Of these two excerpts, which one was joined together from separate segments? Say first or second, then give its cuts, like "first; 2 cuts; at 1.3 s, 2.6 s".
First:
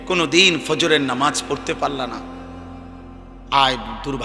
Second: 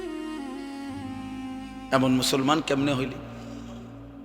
second; 2 cuts; at 1.2 s, 3.2 s